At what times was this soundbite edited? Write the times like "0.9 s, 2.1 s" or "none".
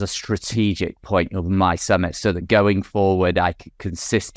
none